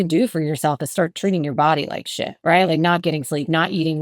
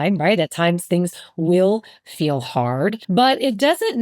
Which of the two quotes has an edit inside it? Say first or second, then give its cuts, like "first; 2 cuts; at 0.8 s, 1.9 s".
second; 1 cut; at 3.0 s